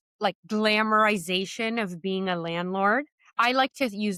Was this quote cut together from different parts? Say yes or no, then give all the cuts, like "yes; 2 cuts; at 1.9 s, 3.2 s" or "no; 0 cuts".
no; 0 cuts